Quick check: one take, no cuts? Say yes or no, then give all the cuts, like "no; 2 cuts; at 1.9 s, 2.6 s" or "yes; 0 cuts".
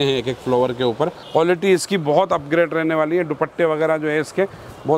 no; 1 cut; at 1.2 s